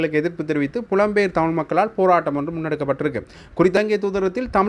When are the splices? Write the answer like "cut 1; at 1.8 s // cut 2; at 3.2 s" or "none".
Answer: cut 1; at 3.8 s